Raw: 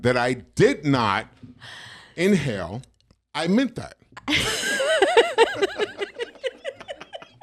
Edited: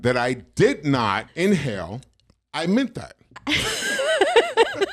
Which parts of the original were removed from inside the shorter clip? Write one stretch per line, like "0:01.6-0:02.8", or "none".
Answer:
0:01.3-0:02.1